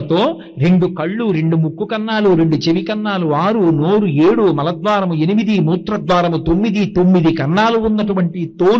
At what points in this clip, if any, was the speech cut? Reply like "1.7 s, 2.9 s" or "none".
none